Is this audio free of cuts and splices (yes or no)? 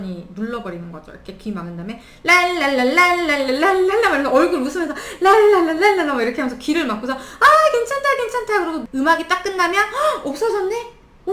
no